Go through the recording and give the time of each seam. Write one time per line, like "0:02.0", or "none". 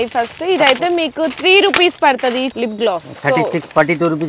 0:02.5